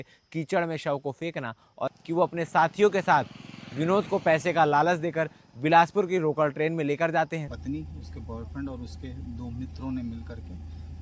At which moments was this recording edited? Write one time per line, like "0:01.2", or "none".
0:02.0
0:07.5